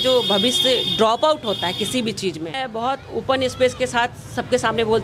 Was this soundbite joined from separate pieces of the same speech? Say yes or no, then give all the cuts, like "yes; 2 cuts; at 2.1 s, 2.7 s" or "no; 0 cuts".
yes; 1 cut; at 2.6 s